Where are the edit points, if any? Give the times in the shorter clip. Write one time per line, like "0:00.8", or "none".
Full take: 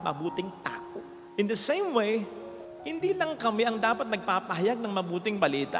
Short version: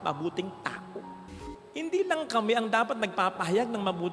0:01.2